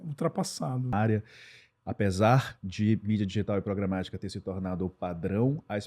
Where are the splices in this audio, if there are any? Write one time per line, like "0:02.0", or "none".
0:00.9